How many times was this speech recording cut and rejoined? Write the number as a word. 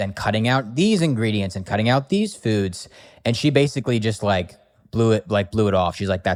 zero